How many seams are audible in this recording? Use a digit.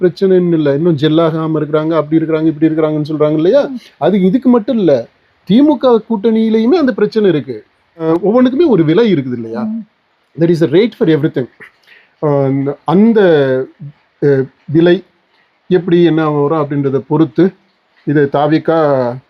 1